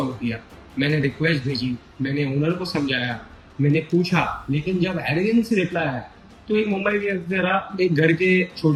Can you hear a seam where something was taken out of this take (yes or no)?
no